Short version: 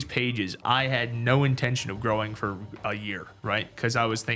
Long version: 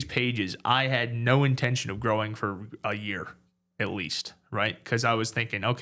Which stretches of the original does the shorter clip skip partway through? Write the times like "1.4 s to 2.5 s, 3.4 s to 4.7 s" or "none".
3.3 s to 4.4 s